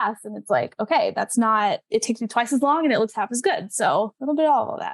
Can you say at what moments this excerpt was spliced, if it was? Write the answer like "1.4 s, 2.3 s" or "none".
1.8 s, 4.2 s